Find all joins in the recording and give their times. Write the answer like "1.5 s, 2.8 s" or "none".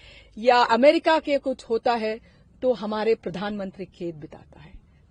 none